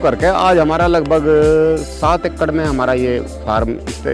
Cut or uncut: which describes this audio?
uncut